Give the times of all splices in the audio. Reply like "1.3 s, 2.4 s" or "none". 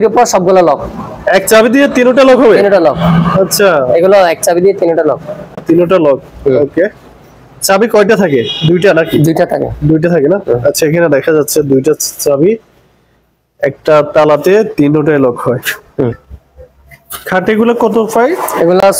none